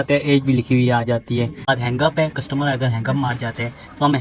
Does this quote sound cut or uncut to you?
cut